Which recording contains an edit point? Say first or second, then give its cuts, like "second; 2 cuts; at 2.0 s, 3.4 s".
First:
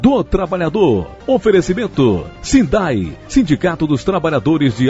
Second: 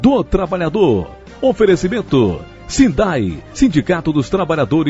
first; 2 cuts; at 1.1 s, 2.3 s